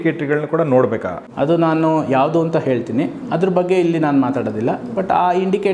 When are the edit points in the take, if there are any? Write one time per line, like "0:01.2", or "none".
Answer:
0:01.2